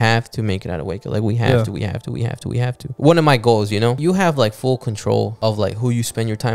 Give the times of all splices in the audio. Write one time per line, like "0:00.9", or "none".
0:02.8
0:04.0
0:05.3